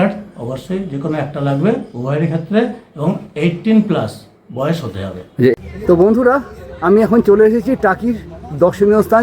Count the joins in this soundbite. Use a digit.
1